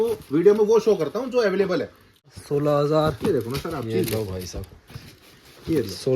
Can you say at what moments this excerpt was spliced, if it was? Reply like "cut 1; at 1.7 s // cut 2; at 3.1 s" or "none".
cut 1; at 2.4 s